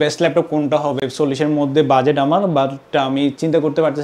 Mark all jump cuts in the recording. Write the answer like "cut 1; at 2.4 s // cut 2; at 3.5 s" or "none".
none